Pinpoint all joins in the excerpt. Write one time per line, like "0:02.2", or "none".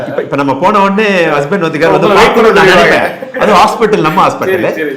none

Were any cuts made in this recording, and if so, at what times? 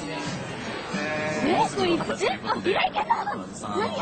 0:02.0

